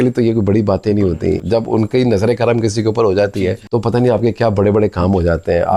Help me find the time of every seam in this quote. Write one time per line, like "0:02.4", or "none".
0:01.4
0:03.6